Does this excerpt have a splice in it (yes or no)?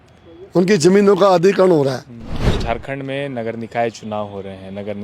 yes